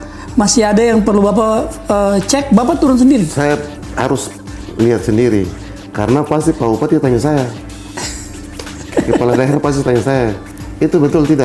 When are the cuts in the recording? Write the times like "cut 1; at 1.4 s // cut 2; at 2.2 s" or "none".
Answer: none